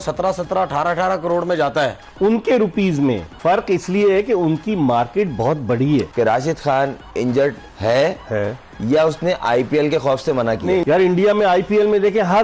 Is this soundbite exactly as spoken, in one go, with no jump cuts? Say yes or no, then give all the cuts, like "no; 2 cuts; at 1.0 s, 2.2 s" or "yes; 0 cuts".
no; 3 cuts; at 3.3 s, 6.1 s, 10.8 s